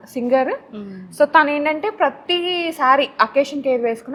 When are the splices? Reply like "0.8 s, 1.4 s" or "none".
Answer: none